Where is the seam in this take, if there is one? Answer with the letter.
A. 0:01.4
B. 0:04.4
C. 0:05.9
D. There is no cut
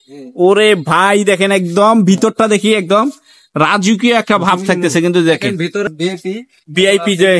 C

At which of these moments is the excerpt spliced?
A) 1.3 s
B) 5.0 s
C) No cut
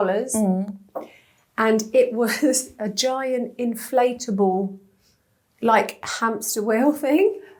C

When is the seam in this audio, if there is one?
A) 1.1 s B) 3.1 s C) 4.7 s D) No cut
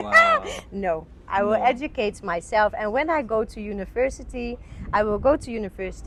D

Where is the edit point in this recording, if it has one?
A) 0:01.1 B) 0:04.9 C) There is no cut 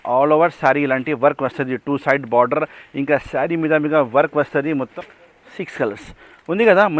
B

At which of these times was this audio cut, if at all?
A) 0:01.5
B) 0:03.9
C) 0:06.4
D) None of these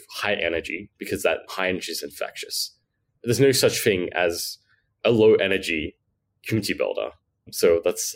A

